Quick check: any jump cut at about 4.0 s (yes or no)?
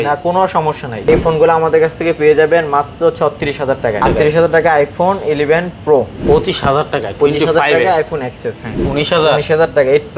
yes